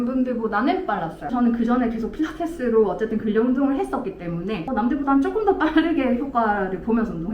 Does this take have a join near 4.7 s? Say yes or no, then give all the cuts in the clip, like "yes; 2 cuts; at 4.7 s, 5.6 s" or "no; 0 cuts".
yes; 2 cuts; at 1.2 s, 4.7 s